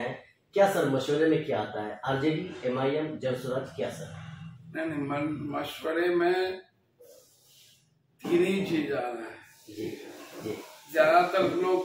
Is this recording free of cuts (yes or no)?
yes